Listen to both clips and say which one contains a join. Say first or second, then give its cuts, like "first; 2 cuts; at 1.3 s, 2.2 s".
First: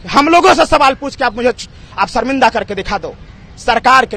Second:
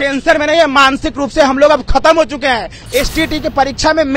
second; 1 cut; at 2.8 s